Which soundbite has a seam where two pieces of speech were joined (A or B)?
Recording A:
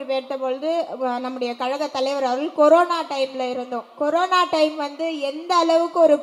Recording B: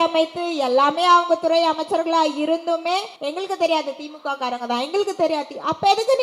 B